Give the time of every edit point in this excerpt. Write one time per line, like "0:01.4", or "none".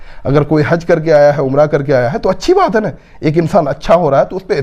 none